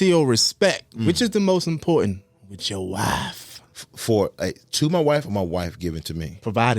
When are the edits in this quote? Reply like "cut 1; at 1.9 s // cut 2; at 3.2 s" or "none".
cut 1; at 3.7 s